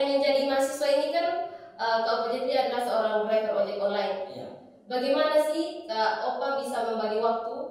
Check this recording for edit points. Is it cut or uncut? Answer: uncut